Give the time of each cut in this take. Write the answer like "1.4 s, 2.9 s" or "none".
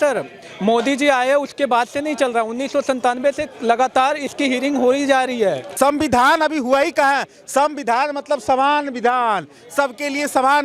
5.6 s